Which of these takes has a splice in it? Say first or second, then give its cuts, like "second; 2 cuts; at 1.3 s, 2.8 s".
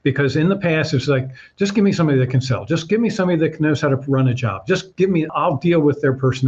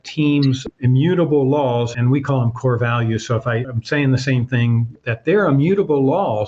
first; 1 cut; at 5.3 s